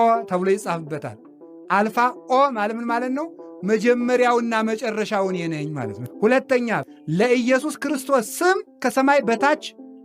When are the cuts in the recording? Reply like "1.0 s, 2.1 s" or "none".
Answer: 6.0 s, 6.8 s, 8.8 s